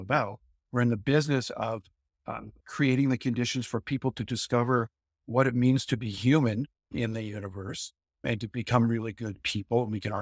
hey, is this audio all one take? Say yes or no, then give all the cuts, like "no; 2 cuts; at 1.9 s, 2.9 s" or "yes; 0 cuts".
no; 2 cuts; at 2.5 s, 6.9 s